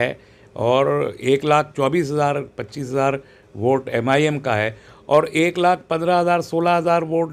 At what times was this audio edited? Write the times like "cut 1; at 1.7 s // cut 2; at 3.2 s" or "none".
none